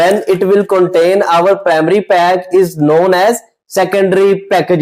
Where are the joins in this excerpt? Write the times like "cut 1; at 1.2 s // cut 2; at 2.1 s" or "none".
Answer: none